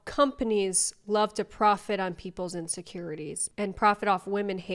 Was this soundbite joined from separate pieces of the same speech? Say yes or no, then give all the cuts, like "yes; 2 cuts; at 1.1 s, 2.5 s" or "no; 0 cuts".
no; 0 cuts